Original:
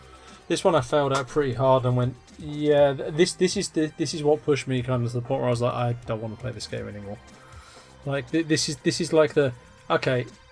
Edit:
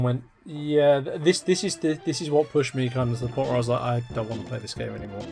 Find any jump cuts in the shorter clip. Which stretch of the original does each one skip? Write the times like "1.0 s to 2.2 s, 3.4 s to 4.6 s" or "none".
none